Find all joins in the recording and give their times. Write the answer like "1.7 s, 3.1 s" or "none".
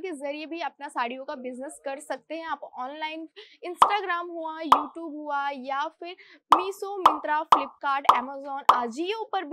none